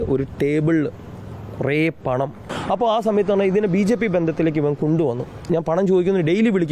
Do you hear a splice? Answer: yes; 2 cuts; at 2.5 s, 5.4 s

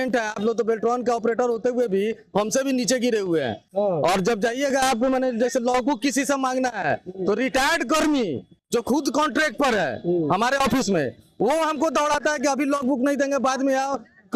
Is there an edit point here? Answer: no; 0 cuts

